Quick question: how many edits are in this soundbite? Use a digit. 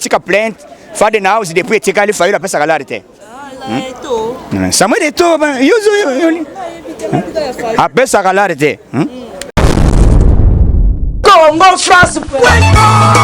1